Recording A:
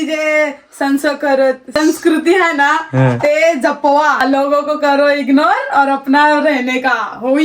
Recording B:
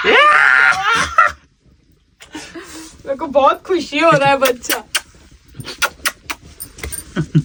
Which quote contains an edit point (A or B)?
A